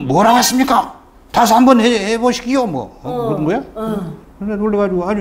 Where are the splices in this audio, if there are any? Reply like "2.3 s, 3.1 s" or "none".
4.2 s